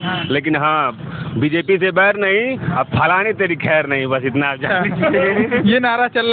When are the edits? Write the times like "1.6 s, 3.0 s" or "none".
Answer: none